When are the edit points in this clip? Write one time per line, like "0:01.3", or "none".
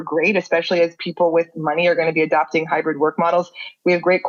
none